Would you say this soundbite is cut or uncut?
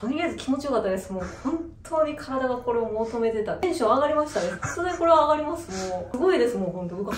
cut